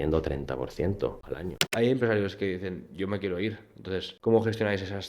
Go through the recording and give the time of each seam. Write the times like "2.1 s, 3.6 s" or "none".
1.7 s, 4.1 s